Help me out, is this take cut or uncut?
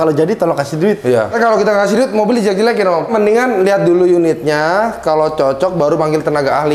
cut